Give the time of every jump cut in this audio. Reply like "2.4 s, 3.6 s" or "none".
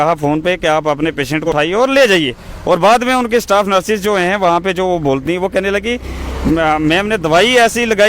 1.5 s